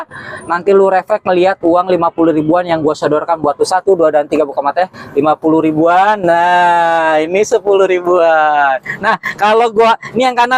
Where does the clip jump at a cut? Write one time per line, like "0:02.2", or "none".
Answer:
none